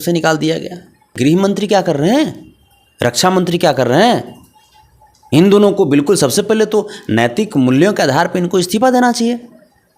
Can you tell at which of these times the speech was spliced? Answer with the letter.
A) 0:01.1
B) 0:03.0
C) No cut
A